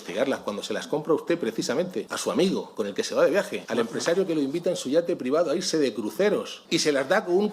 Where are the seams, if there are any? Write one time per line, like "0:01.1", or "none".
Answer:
0:02.1
0:02.7
0:03.6
0:06.6